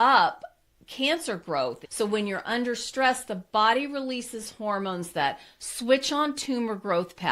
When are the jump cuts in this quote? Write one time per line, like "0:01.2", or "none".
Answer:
0:01.8